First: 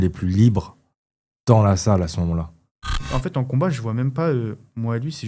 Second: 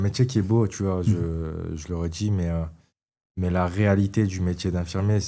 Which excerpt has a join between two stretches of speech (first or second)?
first